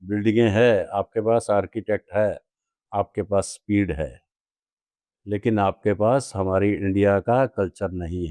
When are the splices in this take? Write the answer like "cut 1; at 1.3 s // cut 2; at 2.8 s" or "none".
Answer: none